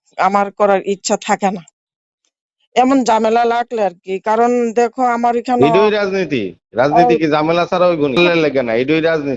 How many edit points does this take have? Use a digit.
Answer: 1